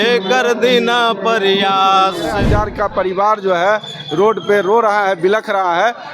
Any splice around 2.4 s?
yes; 1 cut; at 2.4 s

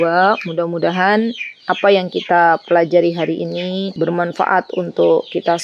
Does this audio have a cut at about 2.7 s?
no; 0 cuts

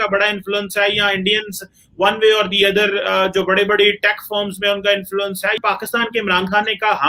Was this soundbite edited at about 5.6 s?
yes; 1 cut; at 5.6 s

